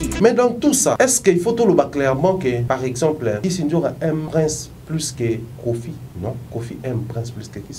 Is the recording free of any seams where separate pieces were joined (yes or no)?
no